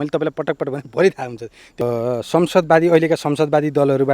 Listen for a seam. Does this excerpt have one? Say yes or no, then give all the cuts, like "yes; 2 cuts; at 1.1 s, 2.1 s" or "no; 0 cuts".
yes; 1 cut; at 1.8 s